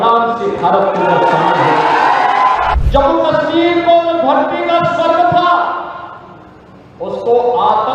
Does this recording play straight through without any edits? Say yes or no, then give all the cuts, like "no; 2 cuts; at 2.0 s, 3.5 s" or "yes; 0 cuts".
no; 1 cut; at 2.7 s